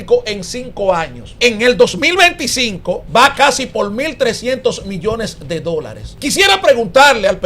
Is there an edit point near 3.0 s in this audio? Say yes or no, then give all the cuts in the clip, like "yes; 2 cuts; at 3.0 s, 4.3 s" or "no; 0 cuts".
yes; 3 cuts; at 1.2 s, 3.0 s, 6.0 s